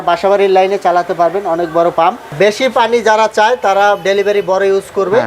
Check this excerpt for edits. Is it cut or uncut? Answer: cut